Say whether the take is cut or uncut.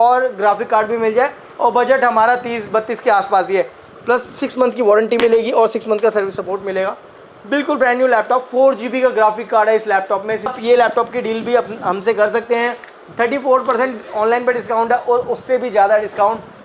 cut